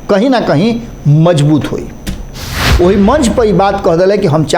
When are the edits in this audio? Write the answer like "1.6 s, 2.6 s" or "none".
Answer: 2.6 s

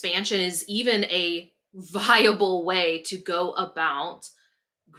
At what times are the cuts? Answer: none

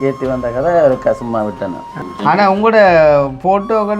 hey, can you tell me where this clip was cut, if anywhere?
2.0 s

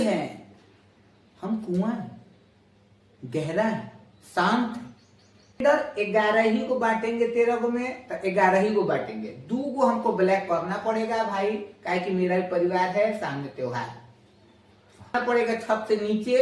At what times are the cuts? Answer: 5.6 s, 15.1 s

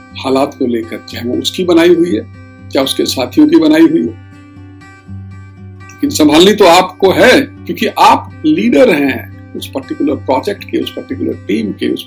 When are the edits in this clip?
none

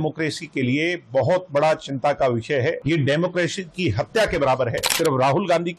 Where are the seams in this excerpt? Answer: 2.8 s, 4.9 s

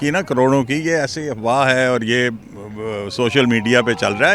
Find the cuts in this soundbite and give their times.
none

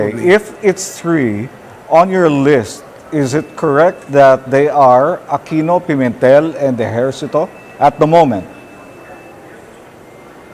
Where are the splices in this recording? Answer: none

